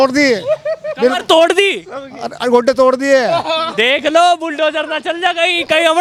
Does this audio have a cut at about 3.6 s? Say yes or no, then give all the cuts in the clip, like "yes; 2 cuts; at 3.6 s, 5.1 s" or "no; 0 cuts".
no; 0 cuts